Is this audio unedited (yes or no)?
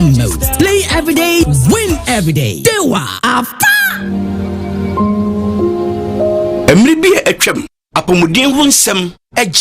no